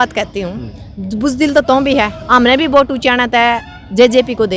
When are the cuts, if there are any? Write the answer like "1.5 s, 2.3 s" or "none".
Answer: none

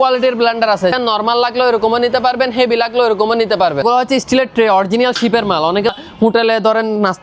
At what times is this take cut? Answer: 0.9 s, 3.8 s, 5.9 s

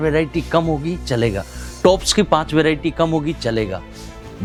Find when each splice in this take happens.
none

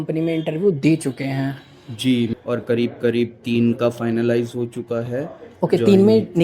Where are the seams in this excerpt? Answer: 2.3 s

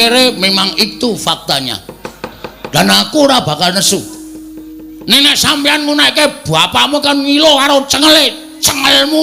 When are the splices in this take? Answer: 2.4 s

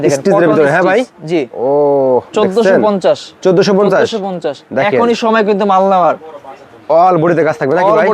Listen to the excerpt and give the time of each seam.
none

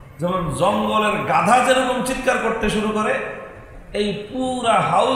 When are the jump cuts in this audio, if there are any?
none

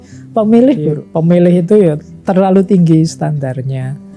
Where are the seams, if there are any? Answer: 1.0 s

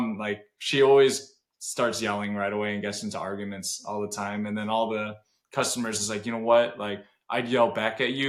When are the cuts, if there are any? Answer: none

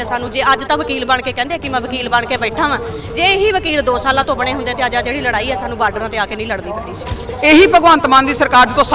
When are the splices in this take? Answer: 7.3 s

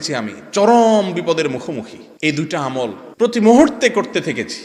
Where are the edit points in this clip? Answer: 2.0 s, 3.0 s

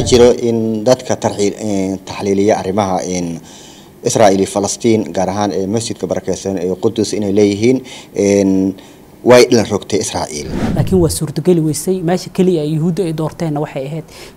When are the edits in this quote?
10.7 s

